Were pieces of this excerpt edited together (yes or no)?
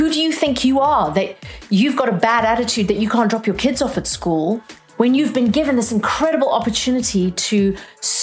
yes